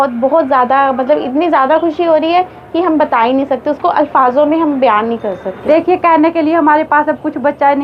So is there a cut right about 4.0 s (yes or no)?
no